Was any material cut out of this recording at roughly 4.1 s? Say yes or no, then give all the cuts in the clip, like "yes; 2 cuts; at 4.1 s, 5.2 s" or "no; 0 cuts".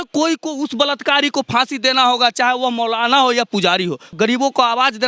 yes; 1 cut; at 4.1 s